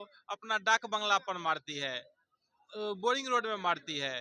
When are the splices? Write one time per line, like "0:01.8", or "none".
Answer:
none